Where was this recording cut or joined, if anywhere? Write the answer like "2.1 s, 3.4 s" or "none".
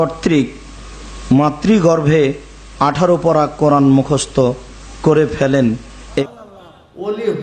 6.2 s